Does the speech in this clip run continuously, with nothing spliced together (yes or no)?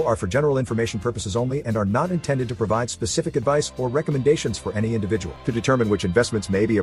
yes